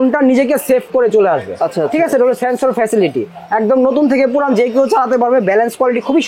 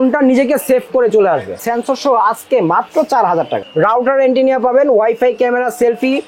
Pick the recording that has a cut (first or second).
second